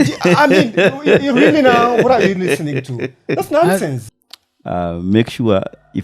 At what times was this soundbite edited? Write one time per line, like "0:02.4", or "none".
0:04.0